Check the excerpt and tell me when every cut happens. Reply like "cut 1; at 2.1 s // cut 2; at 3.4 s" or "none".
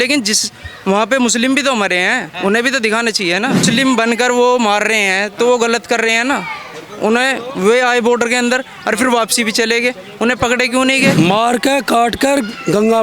cut 1; at 3.6 s // cut 2; at 11.1 s